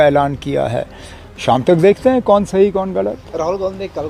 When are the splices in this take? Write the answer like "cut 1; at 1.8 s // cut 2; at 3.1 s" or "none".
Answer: none